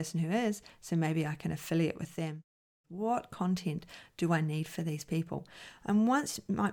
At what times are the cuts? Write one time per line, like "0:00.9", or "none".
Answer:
0:02.6